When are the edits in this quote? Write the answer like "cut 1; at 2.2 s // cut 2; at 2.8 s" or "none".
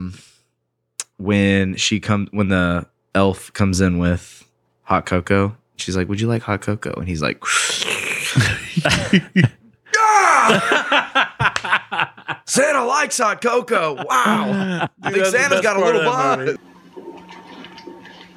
cut 1; at 16.6 s